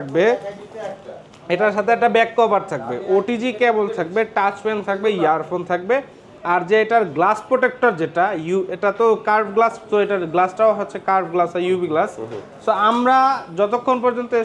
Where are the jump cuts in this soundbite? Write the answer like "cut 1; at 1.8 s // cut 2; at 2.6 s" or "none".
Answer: none